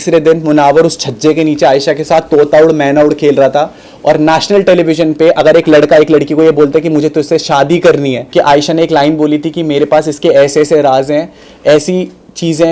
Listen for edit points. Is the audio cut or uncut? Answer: cut